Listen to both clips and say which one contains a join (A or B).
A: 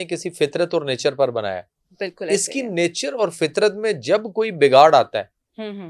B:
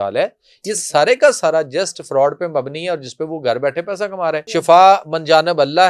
B